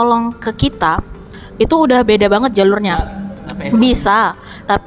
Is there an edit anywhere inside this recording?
no; 0 cuts

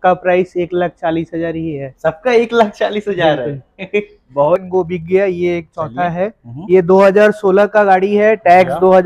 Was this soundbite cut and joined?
yes; 1 cut; at 4.6 s

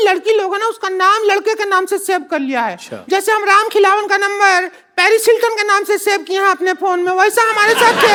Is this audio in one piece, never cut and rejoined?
yes; 0 cuts

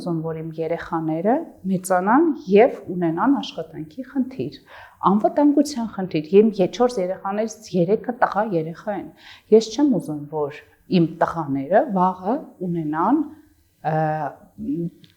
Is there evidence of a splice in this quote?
no; 0 cuts

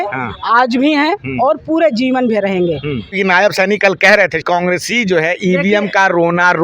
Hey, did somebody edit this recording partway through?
yes; 2 cuts; at 3.1 s, 4.4 s

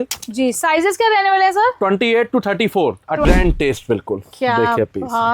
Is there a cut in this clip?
yes; 1 cut; at 3.3 s

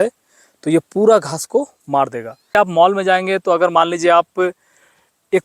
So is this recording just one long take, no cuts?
no; 1 cut; at 2.5 s

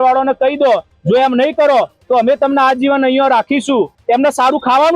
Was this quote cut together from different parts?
yes; 1 cut; at 4.0 s

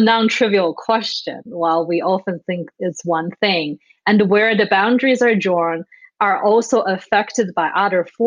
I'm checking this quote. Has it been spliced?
no; 0 cuts

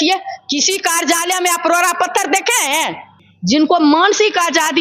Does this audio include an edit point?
yes; 1 cut; at 3.3 s

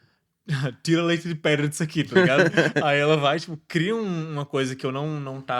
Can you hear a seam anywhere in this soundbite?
no; 0 cuts

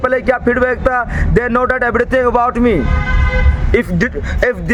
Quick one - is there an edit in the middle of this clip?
no; 0 cuts

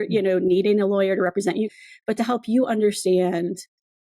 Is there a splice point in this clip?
yes; 1 cut; at 1.8 s

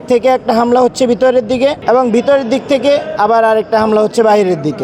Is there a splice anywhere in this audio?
yes; 1 cut; at 1.8 s

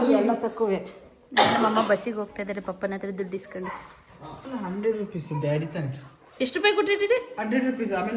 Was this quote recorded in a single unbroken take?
yes; 0 cuts

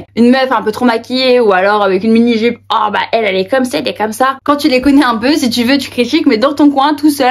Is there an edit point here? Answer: yes; 1 cut; at 4.4 s

